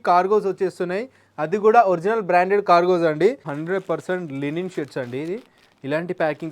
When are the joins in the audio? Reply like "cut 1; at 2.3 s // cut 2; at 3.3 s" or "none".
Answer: cut 1; at 3.5 s